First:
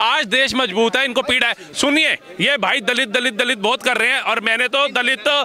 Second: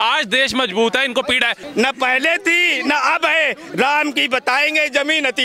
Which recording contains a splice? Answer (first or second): second